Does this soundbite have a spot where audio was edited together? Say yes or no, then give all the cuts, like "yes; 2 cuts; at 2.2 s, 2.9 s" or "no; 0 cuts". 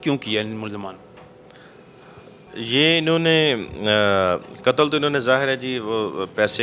no; 0 cuts